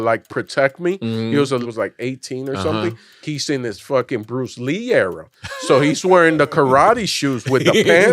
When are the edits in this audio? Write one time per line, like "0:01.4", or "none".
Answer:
0:01.6
0:03.2

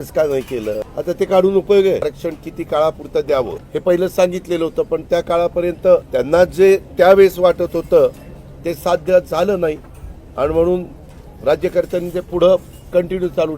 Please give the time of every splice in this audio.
0:00.9
0:02.1
0:03.6
0:06.1

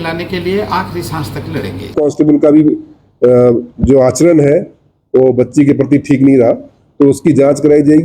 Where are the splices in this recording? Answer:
0:01.9

